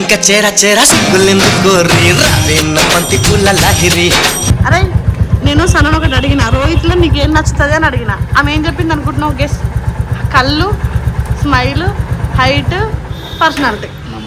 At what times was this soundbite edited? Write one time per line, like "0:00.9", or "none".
0:04.5